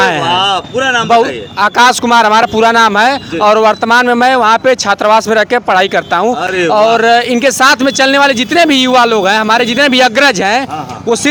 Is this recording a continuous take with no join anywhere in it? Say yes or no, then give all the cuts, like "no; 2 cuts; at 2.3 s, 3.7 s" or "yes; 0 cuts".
yes; 0 cuts